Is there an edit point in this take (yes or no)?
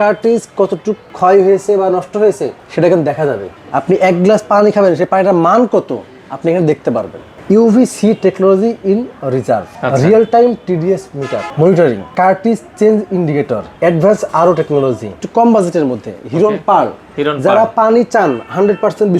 yes